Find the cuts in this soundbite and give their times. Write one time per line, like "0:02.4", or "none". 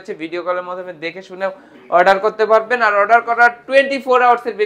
none